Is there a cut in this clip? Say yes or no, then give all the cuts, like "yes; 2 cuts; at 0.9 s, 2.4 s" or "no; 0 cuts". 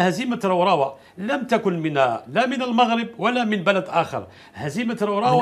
no; 0 cuts